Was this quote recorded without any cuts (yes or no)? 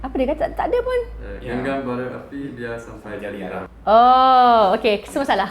no